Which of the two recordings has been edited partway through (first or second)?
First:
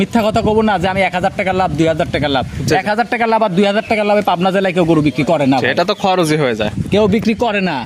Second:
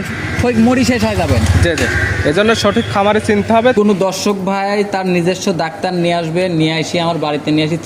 second